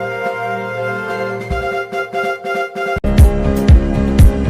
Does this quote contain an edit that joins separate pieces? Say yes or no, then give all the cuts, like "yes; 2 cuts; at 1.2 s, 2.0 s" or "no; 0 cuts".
no; 0 cuts